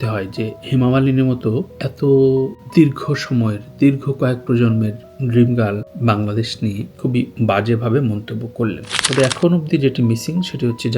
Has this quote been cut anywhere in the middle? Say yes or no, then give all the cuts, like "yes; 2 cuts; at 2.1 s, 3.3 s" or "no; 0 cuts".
yes; 1 cut; at 9.0 s